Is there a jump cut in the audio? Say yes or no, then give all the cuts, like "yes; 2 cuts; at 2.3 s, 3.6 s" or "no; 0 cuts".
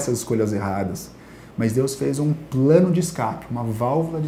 no; 0 cuts